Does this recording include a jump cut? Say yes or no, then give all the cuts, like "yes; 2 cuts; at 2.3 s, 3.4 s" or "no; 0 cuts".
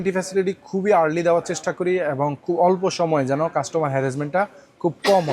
no; 0 cuts